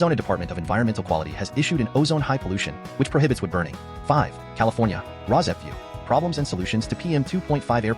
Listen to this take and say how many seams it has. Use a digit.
1